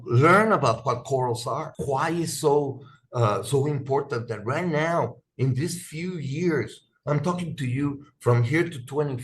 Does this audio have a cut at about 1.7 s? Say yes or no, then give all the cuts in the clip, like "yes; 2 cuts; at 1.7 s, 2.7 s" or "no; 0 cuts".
yes; 1 cut; at 1.7 s